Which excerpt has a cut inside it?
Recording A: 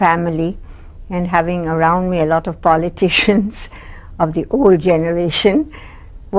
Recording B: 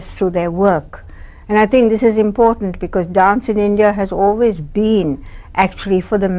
B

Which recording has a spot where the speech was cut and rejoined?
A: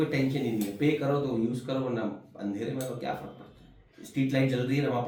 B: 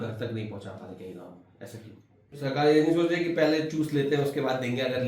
B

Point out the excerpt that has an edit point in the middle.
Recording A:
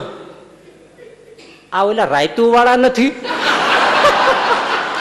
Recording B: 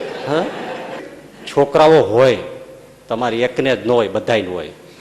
B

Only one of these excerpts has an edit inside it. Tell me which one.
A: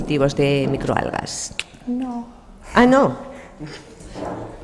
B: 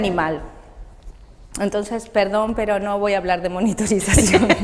A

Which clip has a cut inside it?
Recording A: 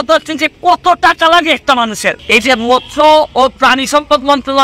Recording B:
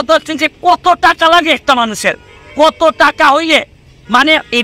A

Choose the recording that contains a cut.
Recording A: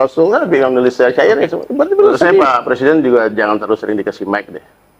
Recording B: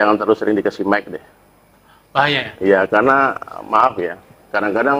A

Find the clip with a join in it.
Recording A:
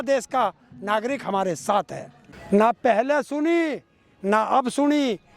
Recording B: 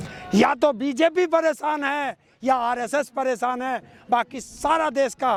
A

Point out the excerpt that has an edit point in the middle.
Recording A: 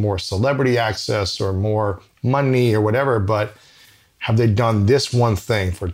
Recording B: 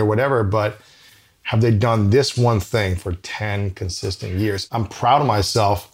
B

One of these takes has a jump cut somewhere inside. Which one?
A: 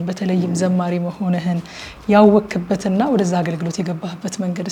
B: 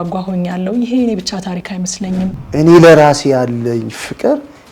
B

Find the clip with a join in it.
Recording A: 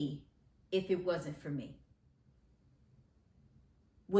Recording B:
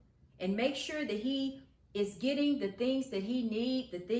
A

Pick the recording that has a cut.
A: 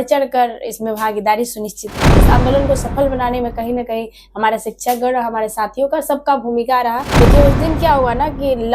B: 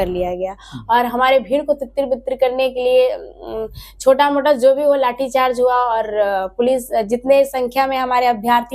A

